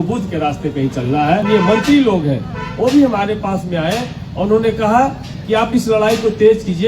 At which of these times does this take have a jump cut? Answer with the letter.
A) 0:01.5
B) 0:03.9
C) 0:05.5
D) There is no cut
A